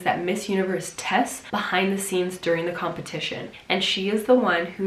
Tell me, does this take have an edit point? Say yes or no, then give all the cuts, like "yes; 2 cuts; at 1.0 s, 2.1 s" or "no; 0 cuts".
yes; 2 cuts; at 1.4 s, 3.6 s